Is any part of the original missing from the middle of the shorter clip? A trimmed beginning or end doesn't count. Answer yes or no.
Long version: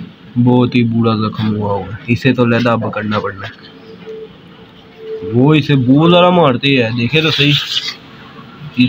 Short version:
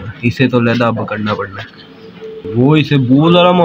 yes